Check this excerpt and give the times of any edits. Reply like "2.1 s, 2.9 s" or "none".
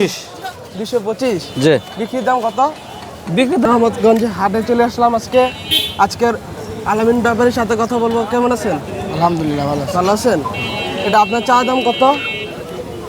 3.7 s